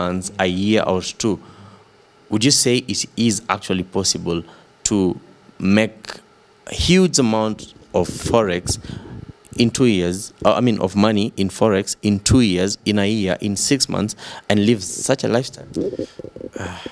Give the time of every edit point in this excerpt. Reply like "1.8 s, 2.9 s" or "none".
none